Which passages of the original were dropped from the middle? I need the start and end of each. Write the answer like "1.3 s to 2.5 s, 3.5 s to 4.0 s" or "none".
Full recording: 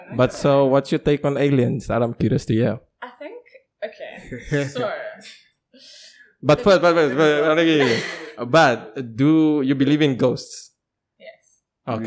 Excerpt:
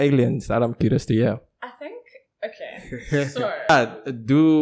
5.1 s to 8.6 s